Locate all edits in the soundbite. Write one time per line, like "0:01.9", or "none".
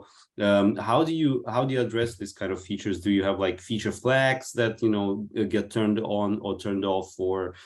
none

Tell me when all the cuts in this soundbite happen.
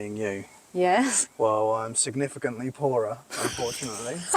none

